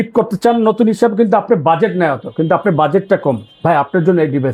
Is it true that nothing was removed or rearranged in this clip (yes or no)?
yes